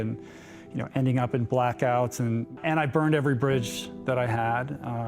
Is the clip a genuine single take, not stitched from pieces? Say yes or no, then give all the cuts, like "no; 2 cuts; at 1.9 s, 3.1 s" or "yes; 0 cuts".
no; 1 cut; at 2.6 s